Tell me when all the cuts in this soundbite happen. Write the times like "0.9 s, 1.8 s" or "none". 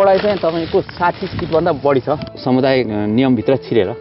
2.3 s